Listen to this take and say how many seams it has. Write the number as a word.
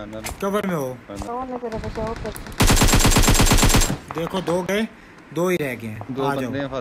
one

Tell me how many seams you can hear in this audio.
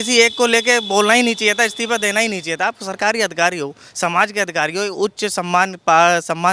zero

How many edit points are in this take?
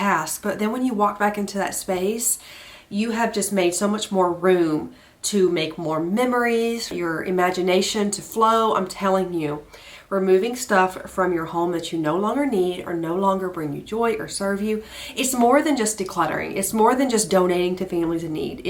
zero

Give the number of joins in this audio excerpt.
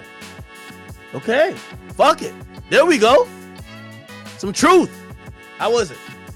zero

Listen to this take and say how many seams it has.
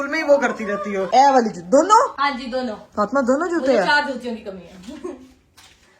two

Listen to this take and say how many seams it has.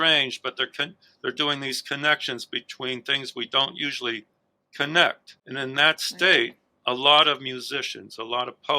one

